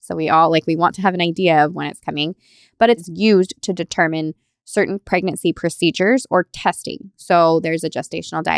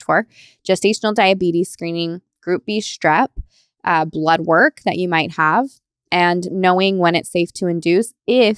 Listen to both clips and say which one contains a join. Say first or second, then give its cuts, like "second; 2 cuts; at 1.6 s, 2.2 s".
first; 1 cut; at 3.0 s